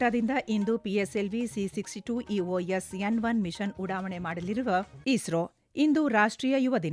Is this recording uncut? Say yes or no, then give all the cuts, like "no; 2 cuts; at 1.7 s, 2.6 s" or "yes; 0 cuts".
no; 1 cut; at 4.9 s